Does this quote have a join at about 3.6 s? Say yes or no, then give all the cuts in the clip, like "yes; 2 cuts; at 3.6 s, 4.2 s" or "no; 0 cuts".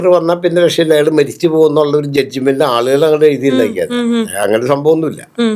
no; 0 cuts